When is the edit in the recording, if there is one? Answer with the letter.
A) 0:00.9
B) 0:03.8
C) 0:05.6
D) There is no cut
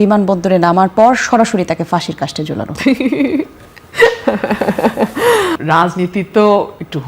C